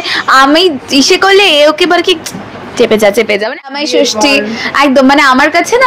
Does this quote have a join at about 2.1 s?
no; 1 cut; at 3.8 s

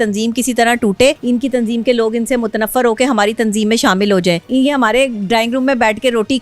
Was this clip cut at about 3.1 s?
no; 2 cuts; at 1.2 s, 4.4 s

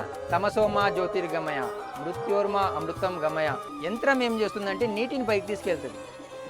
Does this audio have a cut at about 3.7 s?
yes; 1 cut; at 3.7 s

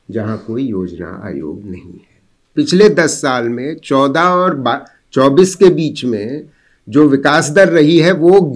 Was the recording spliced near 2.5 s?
yes; 1 cut; at 2.5 s

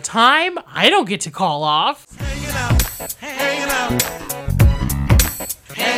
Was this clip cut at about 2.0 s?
yes; 1 cut; at 2.0 s

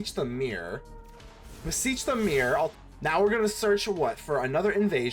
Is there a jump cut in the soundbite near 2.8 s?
yes; 1 cut; at 2.8 s

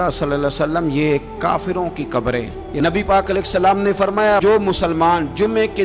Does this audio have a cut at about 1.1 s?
no; 1 cut; at 2.6 s

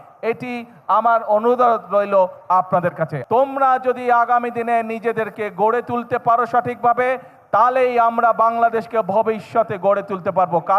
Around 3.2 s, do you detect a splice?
yes; 1 cut; at 3.2 s

